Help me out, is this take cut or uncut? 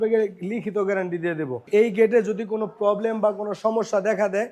cut